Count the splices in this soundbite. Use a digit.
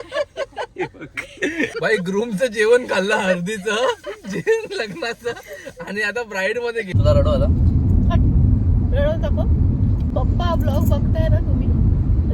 2